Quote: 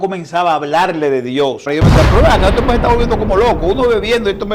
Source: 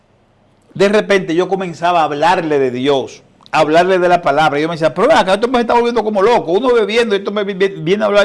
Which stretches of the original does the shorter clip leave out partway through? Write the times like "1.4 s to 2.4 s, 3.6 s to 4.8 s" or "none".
3.2 s to 4.5 s